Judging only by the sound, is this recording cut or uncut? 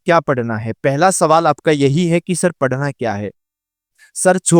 cut